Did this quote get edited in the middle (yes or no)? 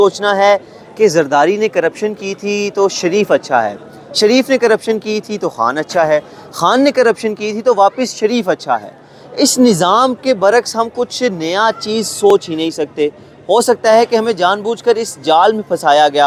no